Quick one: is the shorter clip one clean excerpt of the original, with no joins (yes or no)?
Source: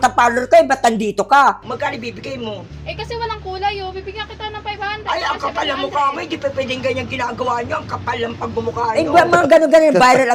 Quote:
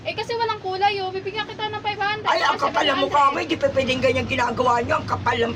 yes